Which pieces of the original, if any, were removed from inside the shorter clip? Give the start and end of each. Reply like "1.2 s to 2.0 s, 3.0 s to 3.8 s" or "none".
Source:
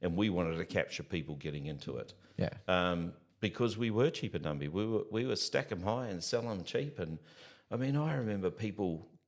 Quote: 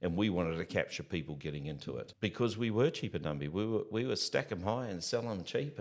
2.1 s to 3.3 s

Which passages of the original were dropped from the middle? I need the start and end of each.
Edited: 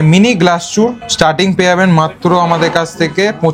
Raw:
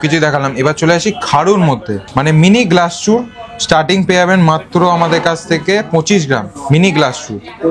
3.3 s to 3.5 s

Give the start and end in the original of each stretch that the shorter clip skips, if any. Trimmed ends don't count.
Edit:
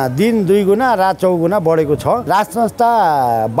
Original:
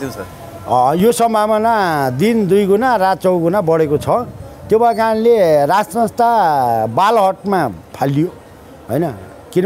4.3 s to 5.7 s

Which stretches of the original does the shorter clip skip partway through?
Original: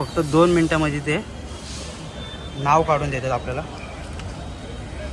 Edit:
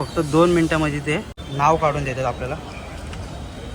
1.4 s to 2.4 s

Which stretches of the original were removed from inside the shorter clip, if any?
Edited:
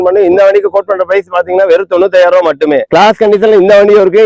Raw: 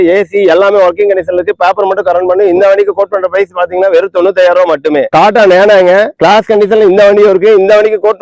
5.1 s to 6.1 s

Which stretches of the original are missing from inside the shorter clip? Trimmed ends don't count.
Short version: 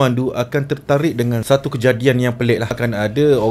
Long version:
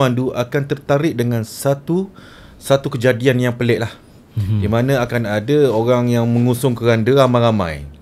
1.4 s to 2.6 s, 3.9 s to 5.1 s

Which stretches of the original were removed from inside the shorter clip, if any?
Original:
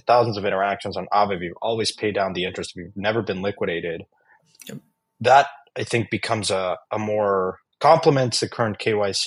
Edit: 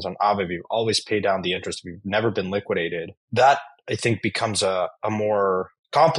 4.1 s to 5.0 s

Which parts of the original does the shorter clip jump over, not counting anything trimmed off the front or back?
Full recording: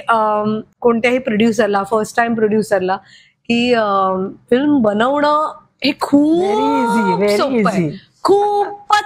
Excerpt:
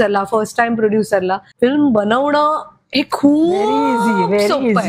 3.1 s to 4.4 s

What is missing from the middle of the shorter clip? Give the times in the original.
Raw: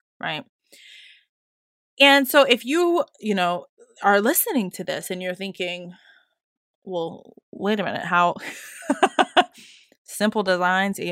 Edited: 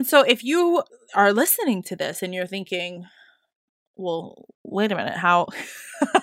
3.1 s to 3.8 s

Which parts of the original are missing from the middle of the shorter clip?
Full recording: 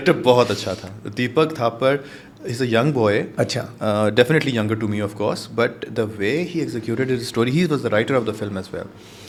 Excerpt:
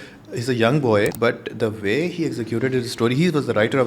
3.3 s to 5.5 s

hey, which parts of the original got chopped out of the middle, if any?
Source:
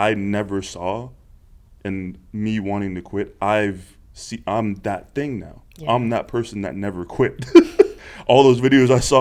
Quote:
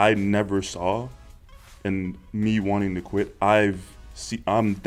none

